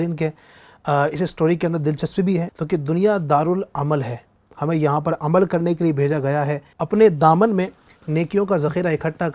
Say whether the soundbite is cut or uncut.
cut